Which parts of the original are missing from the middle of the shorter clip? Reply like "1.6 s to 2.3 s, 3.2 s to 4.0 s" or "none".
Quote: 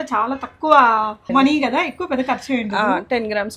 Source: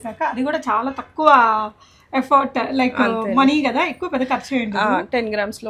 1.8 s to 3.3 s